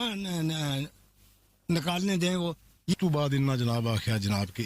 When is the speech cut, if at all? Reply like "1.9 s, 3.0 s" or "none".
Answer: 2.9 s